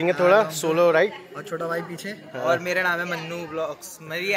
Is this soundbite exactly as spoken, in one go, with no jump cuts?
yes; 0 cuts

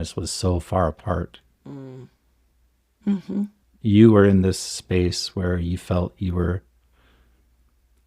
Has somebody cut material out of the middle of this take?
yes; 1 cut; at 3.6 s

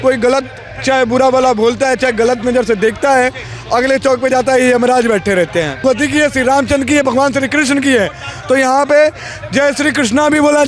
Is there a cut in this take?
yes; 1 cut; at 5.8 s

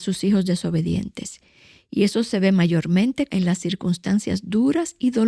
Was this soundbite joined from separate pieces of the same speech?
yes; 1 cut; at 3.3 s

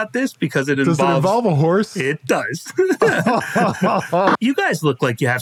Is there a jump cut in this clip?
yes; 1 cut; at 4.3 s

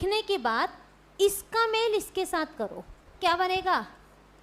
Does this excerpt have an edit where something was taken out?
yes; 1 cut; at 3.2 s

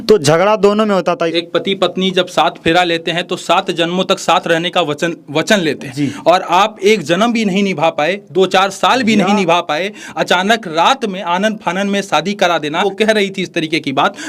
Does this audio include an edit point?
yes; 2 cuts; at 1.3 s, 12.8 s

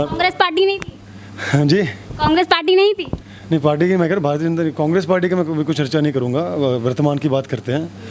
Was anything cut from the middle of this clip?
no; 0 cuts

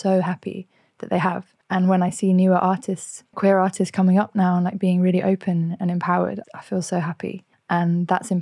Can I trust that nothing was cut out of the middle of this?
no; 4 cuts; at 1.5 s, 3.3 s, 6.4 s, 7.5 s

